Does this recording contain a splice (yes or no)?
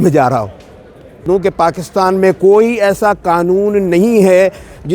yes